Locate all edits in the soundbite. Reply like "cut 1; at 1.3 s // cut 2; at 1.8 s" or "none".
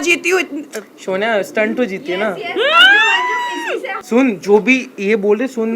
cut 1; at 3.9 s